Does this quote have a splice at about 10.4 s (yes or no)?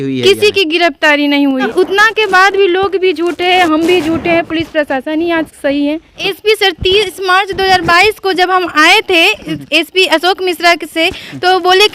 no